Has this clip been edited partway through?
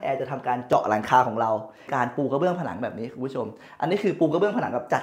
yes; 1 cut; at 1.8 s

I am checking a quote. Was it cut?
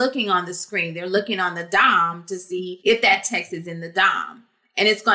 yes; 1 cut; at 2.7 s

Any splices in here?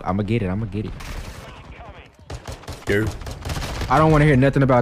yes; 1 cut; at 1.4 s

